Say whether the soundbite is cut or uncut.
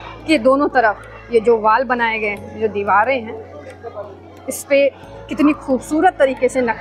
uncut